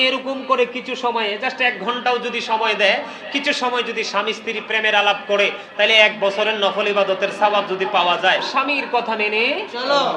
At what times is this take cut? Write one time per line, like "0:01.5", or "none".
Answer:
0:08.5